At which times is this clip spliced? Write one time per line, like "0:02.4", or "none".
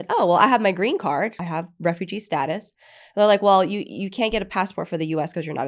0:01.3